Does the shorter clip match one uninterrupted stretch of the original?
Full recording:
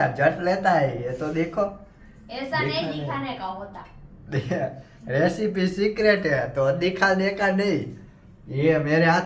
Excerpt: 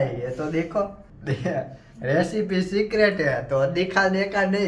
no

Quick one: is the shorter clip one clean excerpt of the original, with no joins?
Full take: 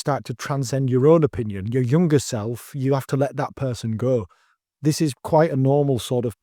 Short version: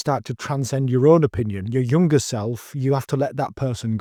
yes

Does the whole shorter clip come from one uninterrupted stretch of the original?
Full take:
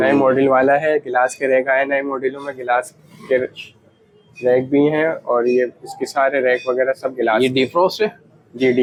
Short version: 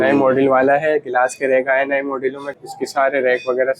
no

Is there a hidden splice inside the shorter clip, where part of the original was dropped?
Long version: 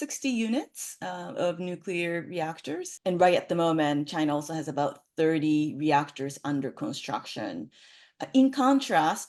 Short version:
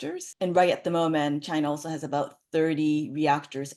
no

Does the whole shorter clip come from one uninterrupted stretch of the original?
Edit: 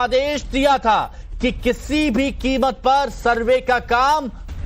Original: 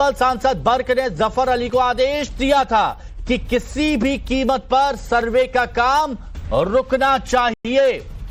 yes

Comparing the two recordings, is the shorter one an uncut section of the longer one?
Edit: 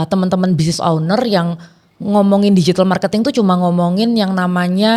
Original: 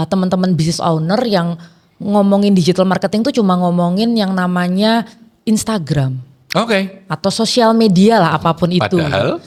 yes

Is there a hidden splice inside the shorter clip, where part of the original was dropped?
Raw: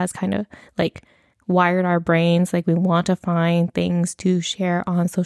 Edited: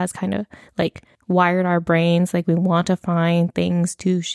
yes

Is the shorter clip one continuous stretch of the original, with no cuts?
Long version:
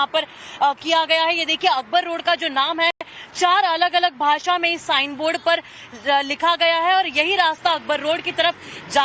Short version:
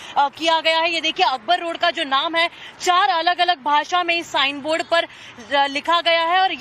no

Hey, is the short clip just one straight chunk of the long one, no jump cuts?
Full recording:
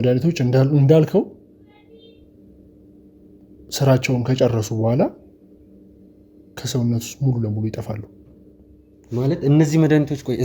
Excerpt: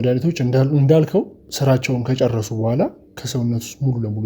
no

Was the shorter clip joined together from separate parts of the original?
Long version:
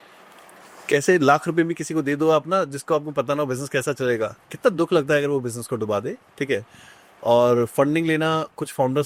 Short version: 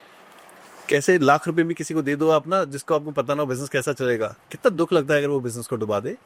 no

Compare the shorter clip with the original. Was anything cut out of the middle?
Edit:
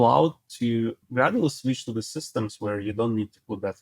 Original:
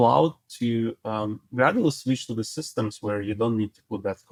yes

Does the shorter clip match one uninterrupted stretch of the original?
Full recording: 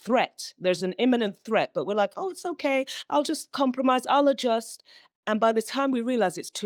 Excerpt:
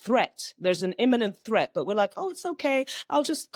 yes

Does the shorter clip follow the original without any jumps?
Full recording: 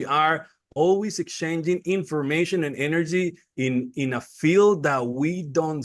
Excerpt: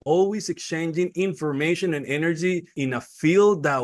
no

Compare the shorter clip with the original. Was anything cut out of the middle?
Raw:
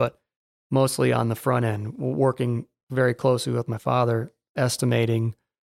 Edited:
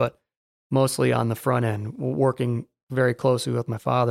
no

